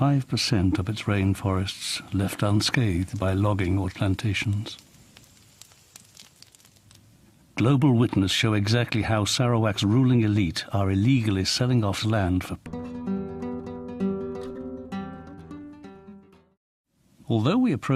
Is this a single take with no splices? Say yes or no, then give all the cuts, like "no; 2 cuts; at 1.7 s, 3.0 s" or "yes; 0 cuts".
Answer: yes; 0 cuts